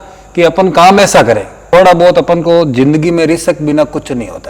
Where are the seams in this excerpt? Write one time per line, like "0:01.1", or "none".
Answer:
0:01.5